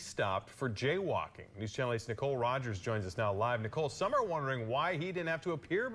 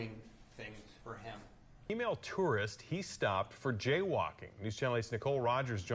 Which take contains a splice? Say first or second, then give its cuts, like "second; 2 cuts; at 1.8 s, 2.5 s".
second; 1 cut; at 1.9 s